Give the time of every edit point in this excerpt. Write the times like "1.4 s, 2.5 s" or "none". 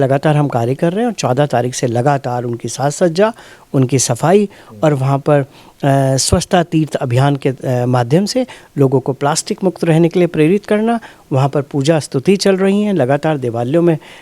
none